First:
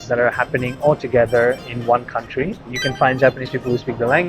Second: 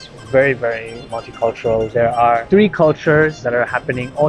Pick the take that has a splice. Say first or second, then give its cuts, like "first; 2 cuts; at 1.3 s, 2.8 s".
first; 1 cut; at 2.8 s